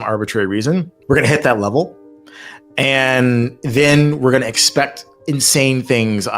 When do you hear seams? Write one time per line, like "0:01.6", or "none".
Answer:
0:00.9